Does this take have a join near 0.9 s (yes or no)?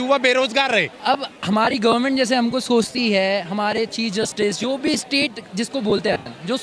yes